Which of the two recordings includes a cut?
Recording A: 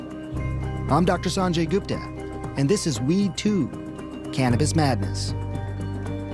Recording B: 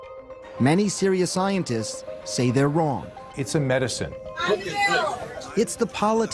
A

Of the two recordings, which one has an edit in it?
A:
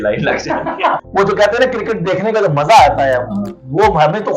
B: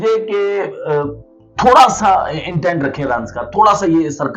A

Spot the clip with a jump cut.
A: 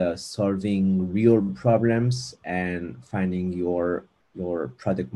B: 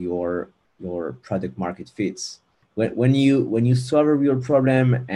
B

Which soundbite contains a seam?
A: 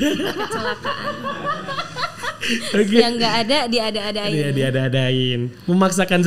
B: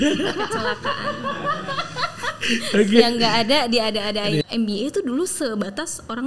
B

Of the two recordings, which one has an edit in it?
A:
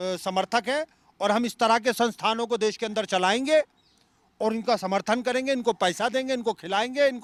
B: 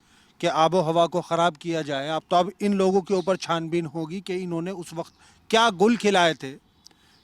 B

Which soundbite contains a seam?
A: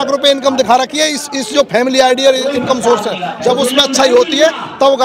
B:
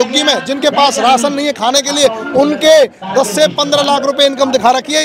A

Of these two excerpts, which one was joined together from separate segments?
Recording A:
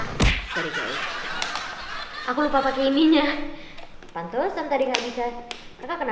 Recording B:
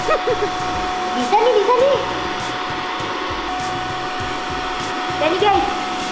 B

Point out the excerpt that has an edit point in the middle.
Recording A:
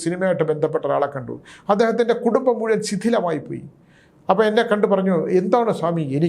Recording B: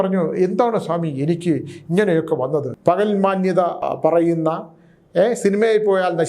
B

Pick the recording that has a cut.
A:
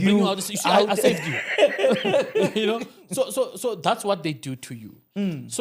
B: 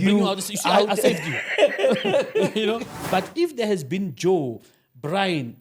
B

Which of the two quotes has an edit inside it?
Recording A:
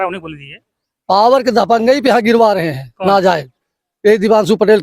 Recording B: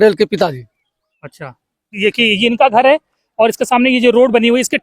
B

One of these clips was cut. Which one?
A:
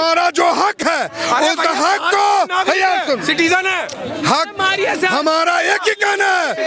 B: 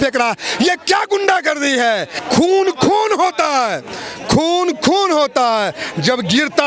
B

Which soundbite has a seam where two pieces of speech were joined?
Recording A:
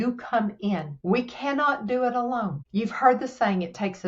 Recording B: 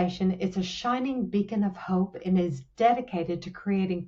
A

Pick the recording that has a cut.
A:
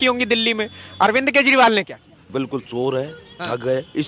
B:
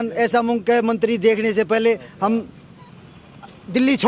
A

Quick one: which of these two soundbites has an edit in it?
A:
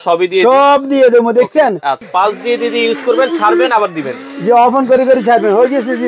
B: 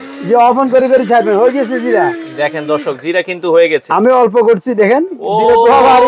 A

